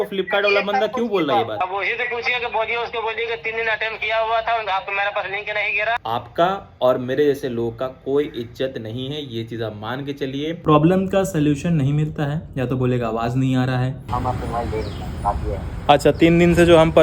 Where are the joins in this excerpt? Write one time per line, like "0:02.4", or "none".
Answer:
0:06.0
0:10.6
0:14.0